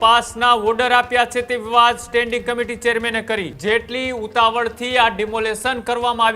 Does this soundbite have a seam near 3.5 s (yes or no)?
yes